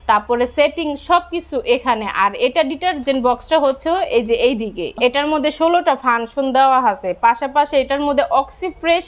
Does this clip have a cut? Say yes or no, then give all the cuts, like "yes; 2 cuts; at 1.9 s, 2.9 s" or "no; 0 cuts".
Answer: no; 0 cuts